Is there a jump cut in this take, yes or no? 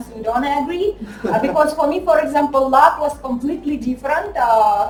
no